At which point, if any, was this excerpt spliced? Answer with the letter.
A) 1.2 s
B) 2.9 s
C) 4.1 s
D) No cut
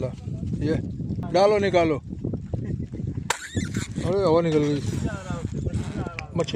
A